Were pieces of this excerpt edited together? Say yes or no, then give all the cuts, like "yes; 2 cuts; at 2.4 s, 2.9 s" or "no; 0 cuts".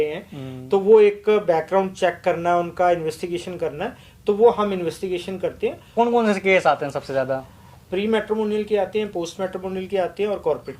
yes; 1 cut; at 5.9 s